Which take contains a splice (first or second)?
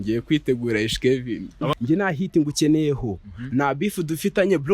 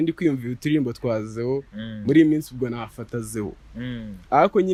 first